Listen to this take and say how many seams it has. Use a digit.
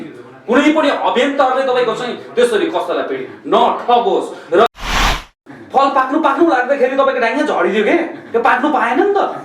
1